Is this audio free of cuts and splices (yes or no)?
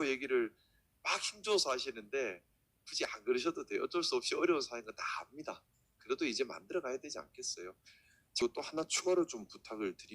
no